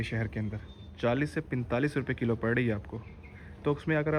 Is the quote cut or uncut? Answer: uncut